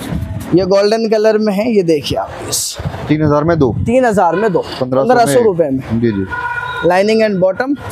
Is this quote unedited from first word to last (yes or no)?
yes